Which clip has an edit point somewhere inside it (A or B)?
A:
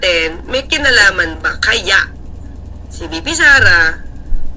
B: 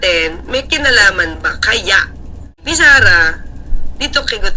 B